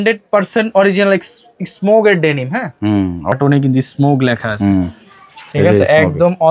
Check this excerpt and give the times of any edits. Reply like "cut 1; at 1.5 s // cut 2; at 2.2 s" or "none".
cut 1; at 3.3 s